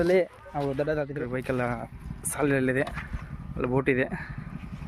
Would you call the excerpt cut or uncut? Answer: cut